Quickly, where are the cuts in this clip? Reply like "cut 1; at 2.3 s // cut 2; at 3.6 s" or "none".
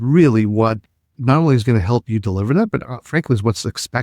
cut 1; at 1.1 s